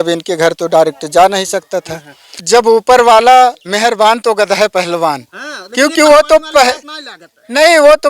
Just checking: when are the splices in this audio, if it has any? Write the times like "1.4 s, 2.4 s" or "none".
2.3 s